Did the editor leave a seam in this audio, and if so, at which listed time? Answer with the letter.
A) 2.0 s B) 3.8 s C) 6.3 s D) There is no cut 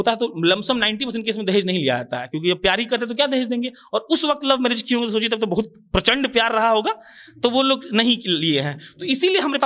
D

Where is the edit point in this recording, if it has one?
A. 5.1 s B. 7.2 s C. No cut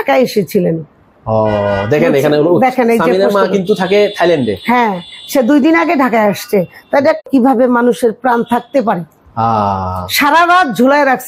B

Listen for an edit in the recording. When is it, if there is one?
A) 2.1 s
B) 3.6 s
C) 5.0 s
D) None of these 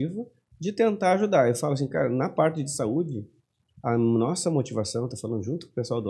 D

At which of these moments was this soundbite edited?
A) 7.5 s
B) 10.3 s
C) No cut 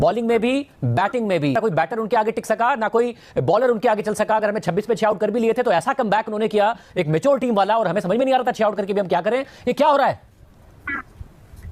C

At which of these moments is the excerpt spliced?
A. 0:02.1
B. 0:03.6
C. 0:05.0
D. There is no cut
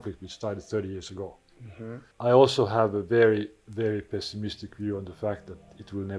A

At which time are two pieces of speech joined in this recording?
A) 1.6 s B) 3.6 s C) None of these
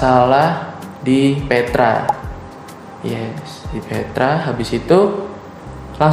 C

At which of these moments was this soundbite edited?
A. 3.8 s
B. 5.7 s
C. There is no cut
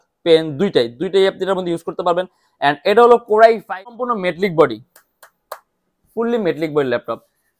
A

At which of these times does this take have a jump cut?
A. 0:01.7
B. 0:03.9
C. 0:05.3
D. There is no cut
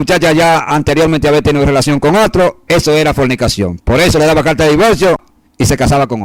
C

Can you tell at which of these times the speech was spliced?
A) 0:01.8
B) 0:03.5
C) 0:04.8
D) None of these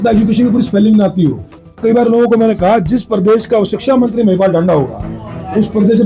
A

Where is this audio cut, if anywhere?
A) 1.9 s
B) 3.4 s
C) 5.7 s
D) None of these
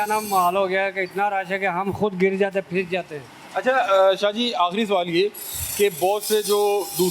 D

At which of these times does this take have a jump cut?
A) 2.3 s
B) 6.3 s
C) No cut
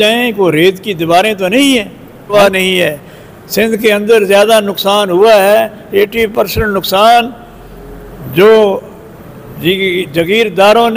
A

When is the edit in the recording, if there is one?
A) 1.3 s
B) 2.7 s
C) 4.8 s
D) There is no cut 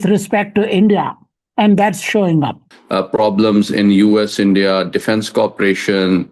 B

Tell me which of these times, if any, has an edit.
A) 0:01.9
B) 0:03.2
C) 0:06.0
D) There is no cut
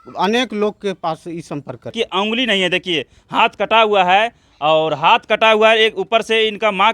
A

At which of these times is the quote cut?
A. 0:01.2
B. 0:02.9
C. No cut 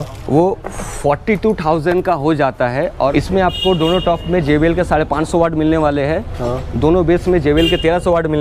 B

